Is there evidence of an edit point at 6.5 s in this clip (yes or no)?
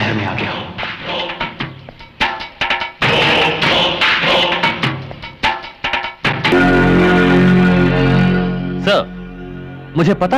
yes